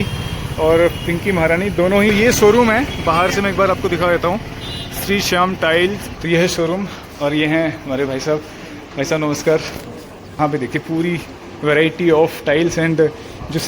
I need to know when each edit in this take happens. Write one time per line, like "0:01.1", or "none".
0:02.1
0:06.1
0:10.4